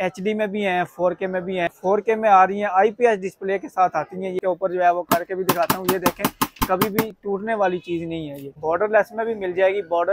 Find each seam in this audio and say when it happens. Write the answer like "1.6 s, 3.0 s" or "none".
1.8 s, 4.4 s, 8.6 s